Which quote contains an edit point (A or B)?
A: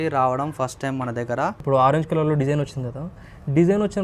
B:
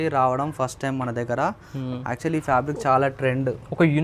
A